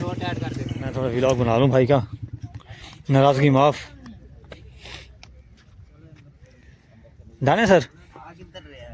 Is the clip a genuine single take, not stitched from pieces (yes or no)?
yes